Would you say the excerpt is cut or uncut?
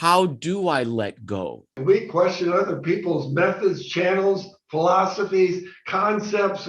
cut